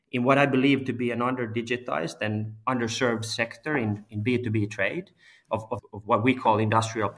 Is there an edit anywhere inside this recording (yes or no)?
yes